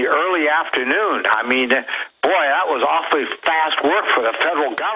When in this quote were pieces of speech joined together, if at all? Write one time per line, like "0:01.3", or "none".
none